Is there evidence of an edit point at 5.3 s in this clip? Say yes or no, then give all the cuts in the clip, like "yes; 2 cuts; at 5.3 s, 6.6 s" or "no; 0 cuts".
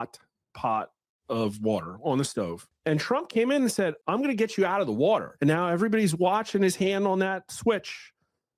yes; 3 cuts; at 2.6 s, 4.0 s, 5.3 s